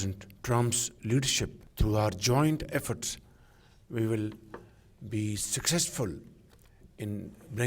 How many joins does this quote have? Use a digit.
1